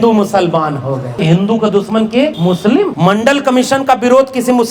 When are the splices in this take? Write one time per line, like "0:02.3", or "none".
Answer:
0:01.1
0:02.5